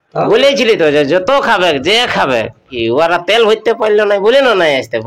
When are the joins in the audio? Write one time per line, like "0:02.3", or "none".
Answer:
0:02.7